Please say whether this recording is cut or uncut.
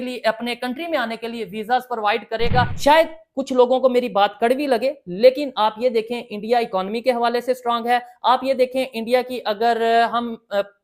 cut